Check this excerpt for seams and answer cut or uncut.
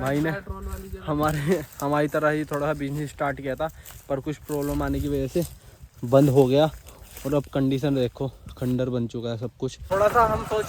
cut